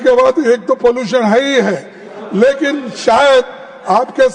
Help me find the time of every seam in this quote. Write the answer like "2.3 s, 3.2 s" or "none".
none